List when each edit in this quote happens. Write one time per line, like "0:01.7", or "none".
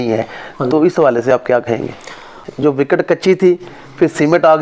0:02.5